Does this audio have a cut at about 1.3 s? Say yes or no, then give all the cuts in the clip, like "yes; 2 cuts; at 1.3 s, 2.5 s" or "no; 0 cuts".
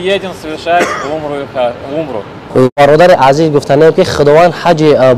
no; 1 cut; at 2.8 s